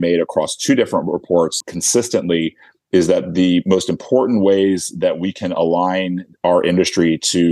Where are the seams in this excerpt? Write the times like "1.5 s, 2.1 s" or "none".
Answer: 1.6 s